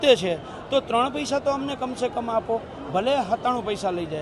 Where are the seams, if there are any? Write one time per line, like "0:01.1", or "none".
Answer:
none